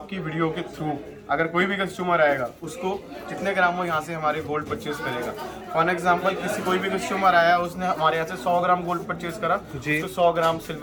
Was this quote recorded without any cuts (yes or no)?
yes